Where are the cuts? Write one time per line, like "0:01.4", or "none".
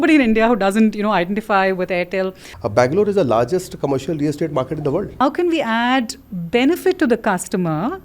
0:02.5
0:05.2